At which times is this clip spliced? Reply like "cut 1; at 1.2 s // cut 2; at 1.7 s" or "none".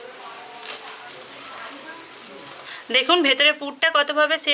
cut 1; at 2.7 s